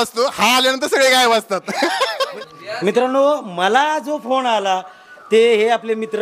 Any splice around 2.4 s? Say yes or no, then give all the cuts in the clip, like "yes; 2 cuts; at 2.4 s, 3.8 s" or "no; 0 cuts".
no; 0 cuts